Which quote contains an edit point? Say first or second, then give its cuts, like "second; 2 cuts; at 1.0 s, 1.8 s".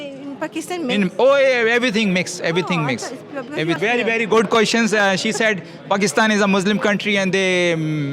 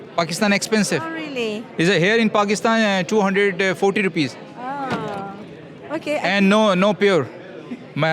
first; 1 cut; at 3.8 s